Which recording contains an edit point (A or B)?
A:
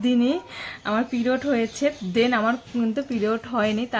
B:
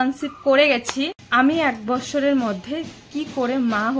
B